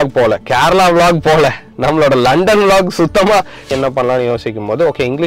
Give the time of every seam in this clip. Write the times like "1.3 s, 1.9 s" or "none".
3.7 s